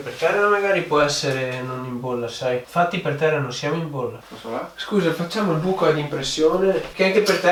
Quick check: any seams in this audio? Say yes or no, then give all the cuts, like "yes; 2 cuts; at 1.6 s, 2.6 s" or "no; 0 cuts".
no; 0 cuts